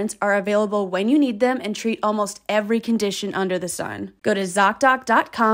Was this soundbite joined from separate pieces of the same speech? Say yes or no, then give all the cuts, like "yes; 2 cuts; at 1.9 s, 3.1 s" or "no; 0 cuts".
yes; 1 cut; at 4.0 s